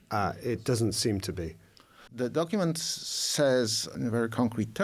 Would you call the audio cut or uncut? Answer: cut